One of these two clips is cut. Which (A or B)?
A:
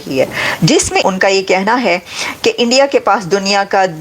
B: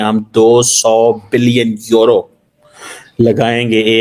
A